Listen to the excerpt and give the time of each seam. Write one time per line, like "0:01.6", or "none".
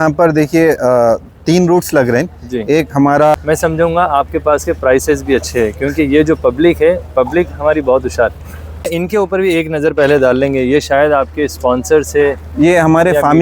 0:03.4
0:08.9